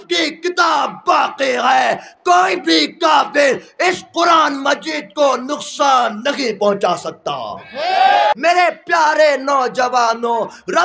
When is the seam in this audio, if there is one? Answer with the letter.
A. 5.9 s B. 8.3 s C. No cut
B